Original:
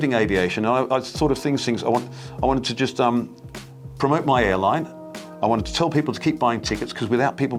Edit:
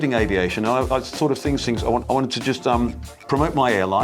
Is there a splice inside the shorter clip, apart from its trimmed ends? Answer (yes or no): yes